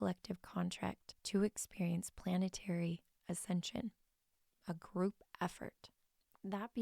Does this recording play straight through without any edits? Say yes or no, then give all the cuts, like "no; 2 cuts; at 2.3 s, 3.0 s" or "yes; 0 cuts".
no; 1 cut; at 1.1 s